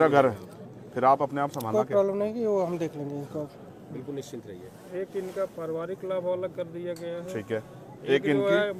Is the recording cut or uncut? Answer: uncut